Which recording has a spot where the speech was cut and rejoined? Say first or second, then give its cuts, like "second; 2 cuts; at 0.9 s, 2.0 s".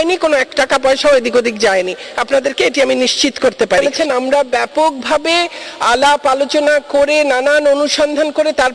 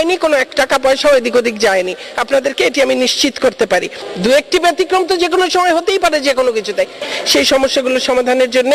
first; 1 cut; at 4.0 s